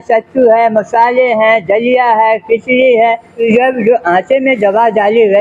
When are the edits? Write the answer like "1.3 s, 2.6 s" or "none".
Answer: 3.4 s